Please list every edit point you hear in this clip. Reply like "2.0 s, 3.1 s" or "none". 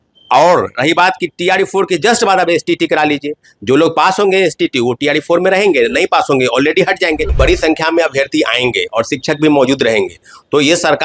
7.3 s

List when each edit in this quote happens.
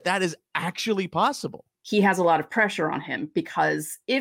1.7 s

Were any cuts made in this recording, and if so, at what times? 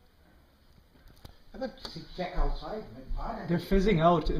none

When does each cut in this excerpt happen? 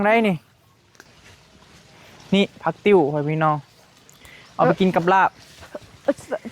0.9 s

